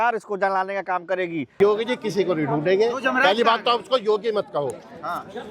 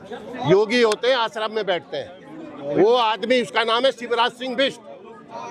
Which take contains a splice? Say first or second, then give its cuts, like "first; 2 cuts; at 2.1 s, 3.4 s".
first; 1 cut; at 1.5 s